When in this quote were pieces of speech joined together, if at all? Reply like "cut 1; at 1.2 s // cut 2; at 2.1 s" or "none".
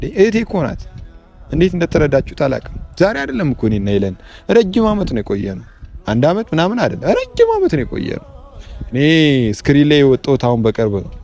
none